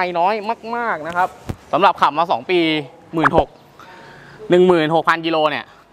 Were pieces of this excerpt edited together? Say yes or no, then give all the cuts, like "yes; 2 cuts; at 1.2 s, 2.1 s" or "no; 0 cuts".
no; 0 cuts